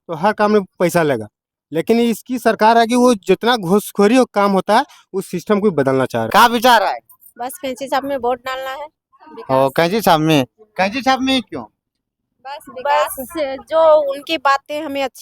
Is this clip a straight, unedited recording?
no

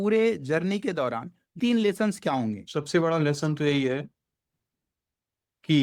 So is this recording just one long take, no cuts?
no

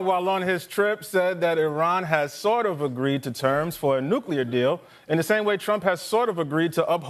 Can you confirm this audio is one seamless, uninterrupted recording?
yes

